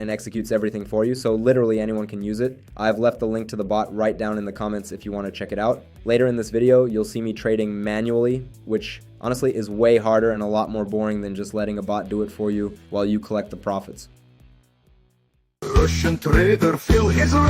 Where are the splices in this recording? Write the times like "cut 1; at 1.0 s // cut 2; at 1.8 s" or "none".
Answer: cut 1; at 15.7 s